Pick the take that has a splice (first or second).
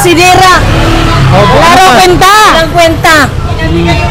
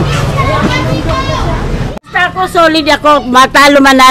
second